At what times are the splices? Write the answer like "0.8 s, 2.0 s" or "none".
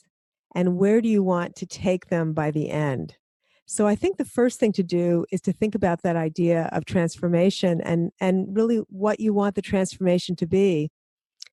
none